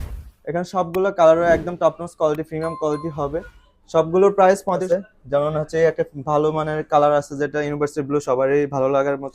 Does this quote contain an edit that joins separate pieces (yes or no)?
yes